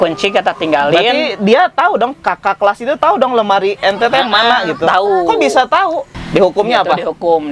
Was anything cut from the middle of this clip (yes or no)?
yes